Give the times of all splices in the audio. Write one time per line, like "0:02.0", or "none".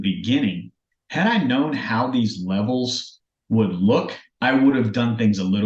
none